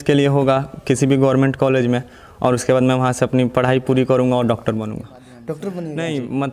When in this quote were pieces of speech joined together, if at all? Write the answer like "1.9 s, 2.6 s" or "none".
5.6 s